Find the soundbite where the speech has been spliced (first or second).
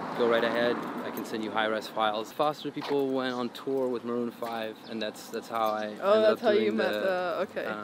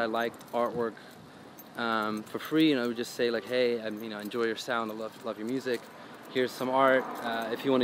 first